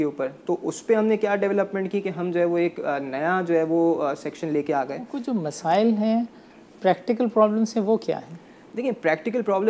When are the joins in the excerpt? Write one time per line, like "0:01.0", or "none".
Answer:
none